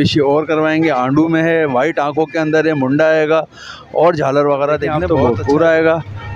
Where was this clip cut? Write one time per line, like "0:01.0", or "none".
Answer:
0:04.9